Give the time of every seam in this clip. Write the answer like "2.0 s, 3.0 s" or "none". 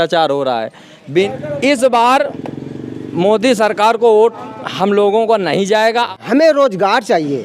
1.3 s, 6.1 s